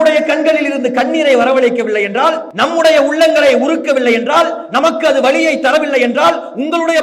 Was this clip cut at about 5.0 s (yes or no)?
no